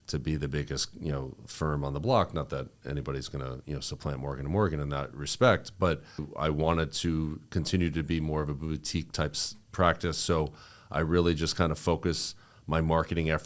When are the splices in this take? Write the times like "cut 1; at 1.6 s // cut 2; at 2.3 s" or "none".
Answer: cut 1; at 6.3 s